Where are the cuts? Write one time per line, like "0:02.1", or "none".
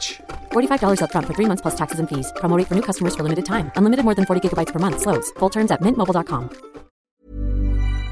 0:07.1